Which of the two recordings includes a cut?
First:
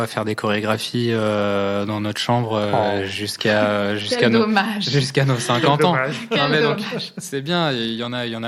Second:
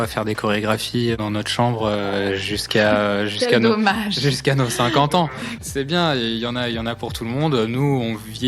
second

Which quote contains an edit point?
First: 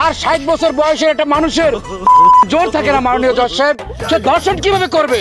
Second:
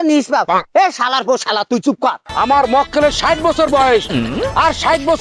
second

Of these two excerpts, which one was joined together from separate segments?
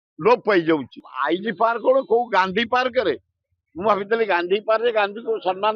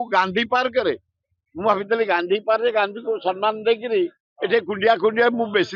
first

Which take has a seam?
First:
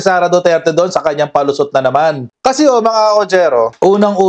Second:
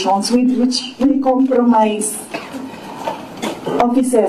first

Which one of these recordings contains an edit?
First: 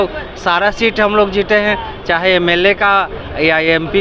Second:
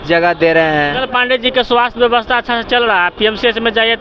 second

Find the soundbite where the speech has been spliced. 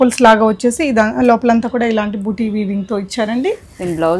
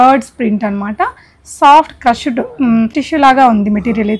second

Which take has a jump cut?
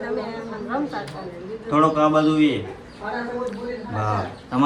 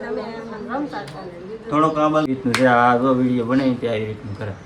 second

